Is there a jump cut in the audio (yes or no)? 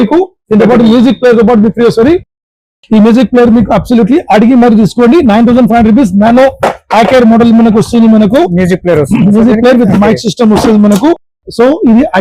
no